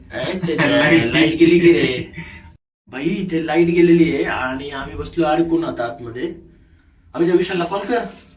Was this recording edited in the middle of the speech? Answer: no; 0 cuts

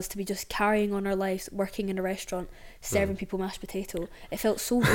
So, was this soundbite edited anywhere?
no; 0 cuts

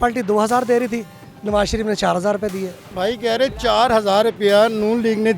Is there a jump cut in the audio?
yes; 1 cut; at 2.8 s

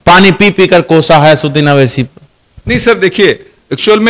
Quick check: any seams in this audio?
no; 0 cuts

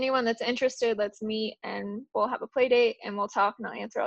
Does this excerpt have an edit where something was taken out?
no; 0 cuts

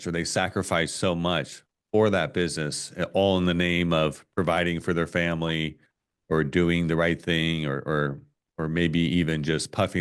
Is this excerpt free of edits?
yes; 0 cuts

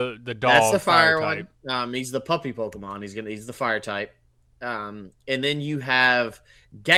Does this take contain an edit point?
no; 0 cuts

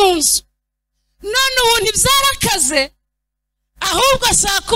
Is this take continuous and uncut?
yes; 0 cuts

